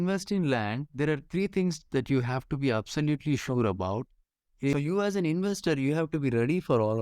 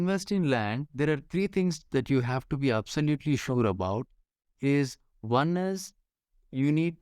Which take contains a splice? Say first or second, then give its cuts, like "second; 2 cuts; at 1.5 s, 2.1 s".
first; 1 cut; at 4.7 s